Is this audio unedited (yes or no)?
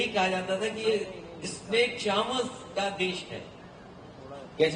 yes